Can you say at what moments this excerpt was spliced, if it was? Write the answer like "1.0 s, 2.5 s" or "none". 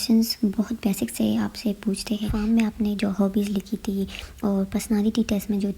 2.3 s